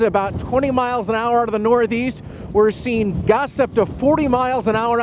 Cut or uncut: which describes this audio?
uncut